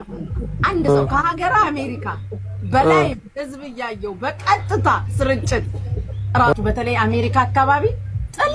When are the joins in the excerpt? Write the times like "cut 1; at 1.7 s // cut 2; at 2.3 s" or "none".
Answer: cut 1; at 6.5 s